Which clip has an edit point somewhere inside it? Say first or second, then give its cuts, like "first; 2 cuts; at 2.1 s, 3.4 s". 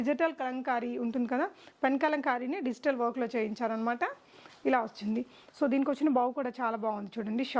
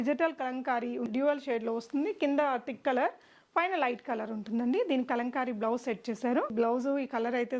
second; 2 cuts; at 1.1 s, 6.5 s